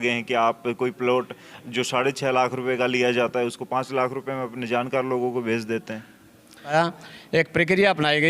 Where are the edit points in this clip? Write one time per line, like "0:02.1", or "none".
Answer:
0:06.7